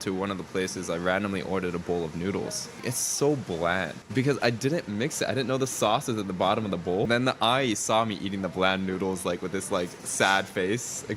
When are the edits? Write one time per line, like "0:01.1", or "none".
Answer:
0:02.8
0:04.0
0:07.1